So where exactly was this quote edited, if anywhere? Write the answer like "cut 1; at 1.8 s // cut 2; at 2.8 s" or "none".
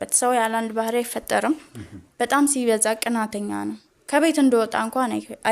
none